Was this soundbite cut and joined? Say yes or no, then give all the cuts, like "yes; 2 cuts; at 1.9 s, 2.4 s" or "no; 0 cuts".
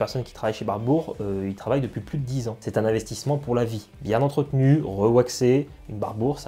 yes; 1 cut; at 2.5 s